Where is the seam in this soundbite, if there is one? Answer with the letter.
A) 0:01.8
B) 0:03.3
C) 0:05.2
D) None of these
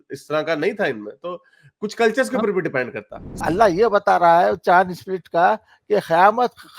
B